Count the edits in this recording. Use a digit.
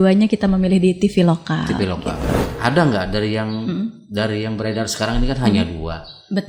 1